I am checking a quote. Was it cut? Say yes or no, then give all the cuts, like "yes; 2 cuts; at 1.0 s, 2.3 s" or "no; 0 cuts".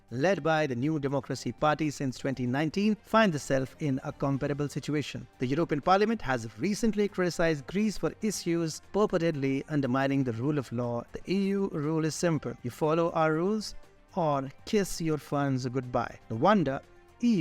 yes; 1 cut; at 11.1 s